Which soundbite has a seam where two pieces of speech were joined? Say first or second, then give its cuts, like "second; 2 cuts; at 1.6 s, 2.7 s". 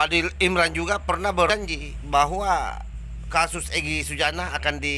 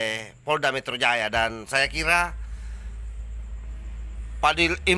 first; 1 cut; at 1.5 s